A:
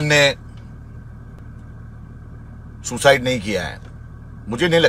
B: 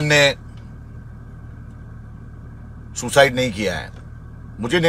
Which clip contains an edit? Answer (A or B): A